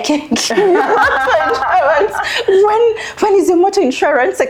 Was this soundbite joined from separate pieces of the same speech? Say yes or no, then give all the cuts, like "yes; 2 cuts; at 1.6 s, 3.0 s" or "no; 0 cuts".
no; 0 cuts